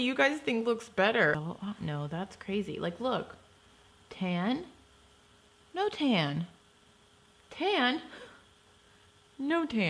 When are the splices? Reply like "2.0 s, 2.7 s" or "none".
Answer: 1.4 s